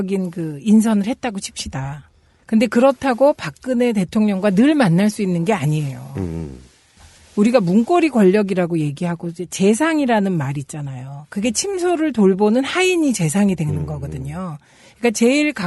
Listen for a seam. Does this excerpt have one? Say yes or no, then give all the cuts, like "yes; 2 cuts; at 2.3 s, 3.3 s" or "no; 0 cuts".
no; 0 cuts